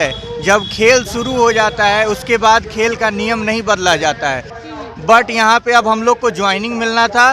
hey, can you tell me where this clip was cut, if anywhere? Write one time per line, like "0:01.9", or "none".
0:04.5